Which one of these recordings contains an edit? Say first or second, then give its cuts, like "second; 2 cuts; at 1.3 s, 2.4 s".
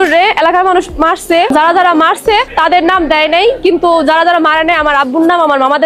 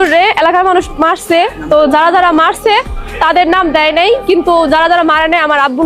first; 2 cuts; at 1.5 s, 2.5 s